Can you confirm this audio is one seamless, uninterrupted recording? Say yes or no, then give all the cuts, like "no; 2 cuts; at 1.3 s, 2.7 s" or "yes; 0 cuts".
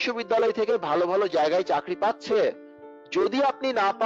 yes; 0 cuts